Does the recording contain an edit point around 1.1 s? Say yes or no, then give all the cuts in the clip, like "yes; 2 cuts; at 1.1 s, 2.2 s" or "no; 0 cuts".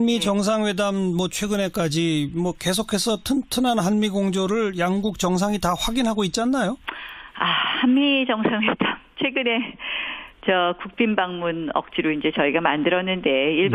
no; 0 cuts